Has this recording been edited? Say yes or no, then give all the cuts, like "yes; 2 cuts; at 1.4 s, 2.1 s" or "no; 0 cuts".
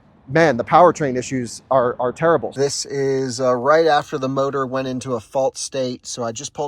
yes; 1 cut; at 2.5 s